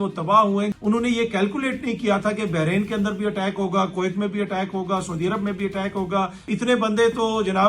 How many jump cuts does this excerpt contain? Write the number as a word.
two